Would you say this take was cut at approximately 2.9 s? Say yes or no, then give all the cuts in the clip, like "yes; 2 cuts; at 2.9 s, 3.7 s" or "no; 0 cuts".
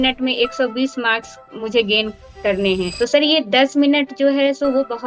yes; 1 cut; at 2.9 s